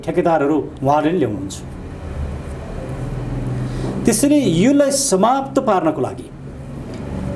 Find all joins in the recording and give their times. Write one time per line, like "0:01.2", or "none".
none